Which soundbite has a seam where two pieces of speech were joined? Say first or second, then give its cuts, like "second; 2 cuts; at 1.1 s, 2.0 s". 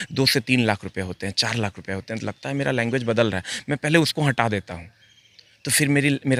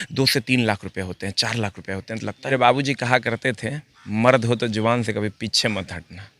second; 1 cut; at 2.5 s